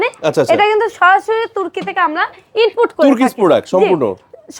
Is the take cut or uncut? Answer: uncut